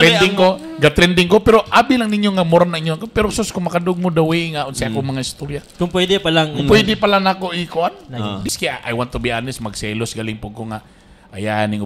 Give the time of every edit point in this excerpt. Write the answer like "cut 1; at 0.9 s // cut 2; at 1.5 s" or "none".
cut 1; at 8.5 s